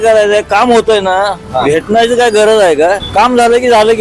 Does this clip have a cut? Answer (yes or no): yes